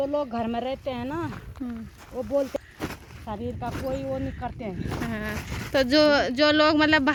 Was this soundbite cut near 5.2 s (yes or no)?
no